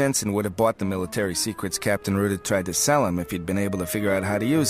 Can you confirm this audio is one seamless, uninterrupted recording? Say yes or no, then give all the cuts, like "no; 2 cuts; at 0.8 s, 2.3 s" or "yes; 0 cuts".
no; 1 cut; at 1.4 s